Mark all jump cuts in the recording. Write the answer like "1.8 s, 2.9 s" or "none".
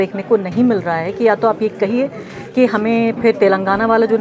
none